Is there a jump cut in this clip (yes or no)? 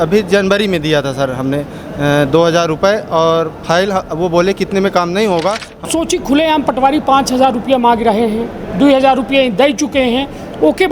yes